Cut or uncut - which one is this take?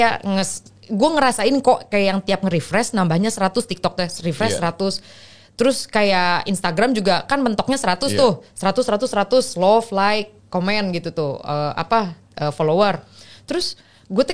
uncut